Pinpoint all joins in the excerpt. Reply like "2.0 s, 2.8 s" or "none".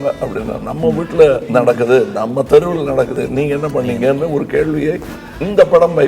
1.4 s, 3.1 s